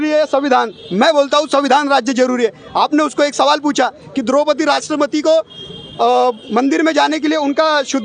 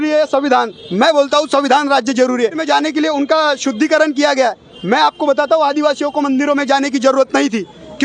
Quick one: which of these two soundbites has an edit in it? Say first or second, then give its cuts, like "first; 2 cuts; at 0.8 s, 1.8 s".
second; 1 cut; at 2.6 s